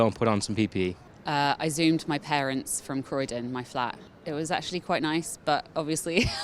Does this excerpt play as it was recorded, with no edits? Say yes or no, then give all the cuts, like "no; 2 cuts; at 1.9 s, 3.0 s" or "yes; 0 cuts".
yes; 0 cuts